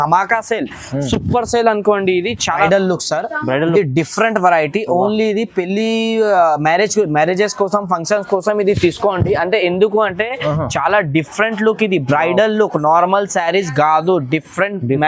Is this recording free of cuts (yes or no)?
no